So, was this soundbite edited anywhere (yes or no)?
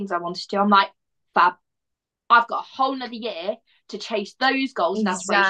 no